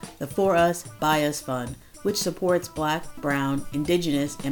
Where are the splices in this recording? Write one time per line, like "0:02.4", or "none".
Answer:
none